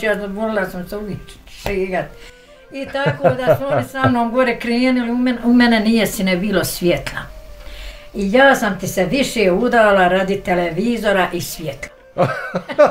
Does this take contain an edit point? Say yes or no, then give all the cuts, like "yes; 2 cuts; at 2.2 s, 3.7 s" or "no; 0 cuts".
no; 0 cuts